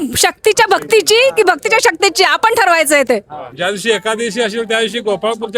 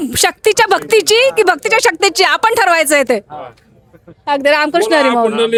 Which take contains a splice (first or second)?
first